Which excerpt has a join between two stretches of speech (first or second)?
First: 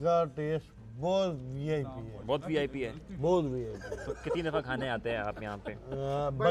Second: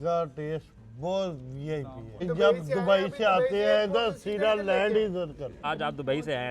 second